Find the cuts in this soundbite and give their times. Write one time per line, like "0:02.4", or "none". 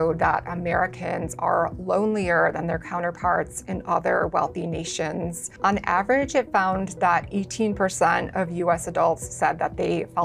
0:05.4